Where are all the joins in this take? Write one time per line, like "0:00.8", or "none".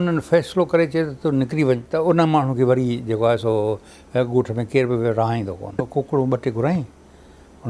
0:01.9
0:05.9